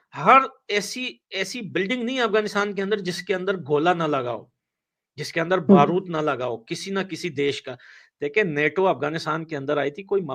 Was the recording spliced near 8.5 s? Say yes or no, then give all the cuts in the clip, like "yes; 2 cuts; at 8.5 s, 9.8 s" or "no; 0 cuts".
no; 0 cuts